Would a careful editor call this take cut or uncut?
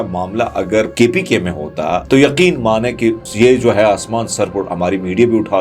cut